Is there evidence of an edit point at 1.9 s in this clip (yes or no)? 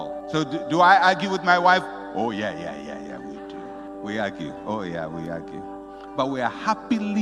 no